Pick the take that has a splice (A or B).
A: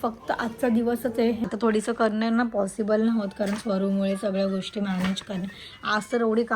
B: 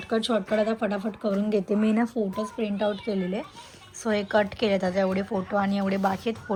A